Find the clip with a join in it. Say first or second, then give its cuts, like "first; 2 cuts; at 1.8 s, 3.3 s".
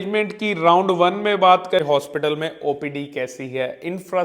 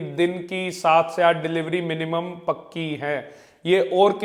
first; 1 cut; at 1.8 s